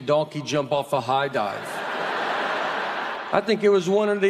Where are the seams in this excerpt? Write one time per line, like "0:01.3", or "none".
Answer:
0:03.2